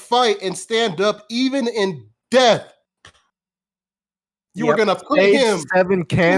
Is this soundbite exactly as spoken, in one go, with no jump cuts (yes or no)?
yes